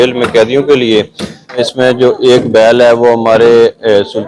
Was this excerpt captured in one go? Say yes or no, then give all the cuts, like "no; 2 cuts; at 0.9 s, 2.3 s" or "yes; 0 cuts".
no; 1 cut; at 1.6 s